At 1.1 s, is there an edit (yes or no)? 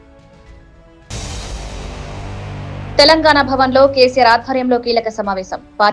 no